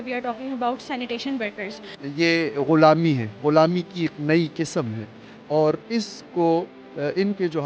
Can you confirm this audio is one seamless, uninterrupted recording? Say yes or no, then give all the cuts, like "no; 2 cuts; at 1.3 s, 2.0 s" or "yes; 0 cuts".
no; 1 cut; at 2.0 s